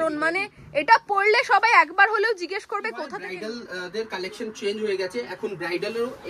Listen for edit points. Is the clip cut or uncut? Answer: cut